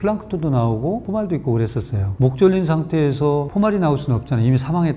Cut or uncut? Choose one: cut